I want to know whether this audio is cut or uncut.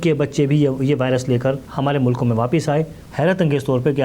cut